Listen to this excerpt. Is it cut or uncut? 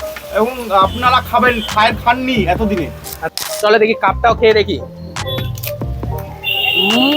cut